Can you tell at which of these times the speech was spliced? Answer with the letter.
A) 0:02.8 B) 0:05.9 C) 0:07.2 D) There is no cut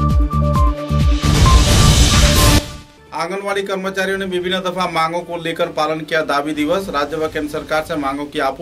A